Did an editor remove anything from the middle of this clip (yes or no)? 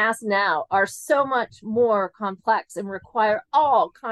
no